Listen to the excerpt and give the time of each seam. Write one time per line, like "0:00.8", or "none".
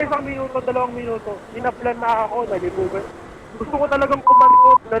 none